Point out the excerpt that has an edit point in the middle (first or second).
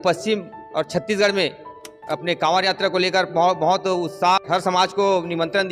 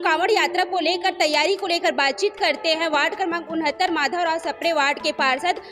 first